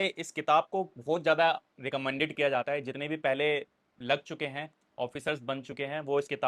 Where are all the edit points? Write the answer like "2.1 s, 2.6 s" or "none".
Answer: none